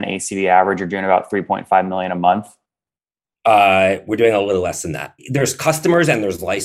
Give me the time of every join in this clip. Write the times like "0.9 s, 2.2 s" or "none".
5.1 s